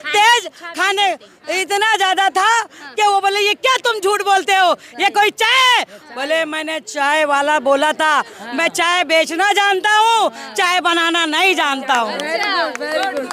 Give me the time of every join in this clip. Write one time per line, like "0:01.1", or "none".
none